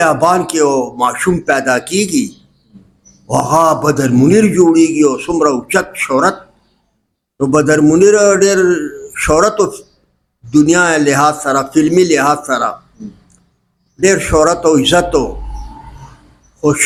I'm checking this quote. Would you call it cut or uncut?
uncut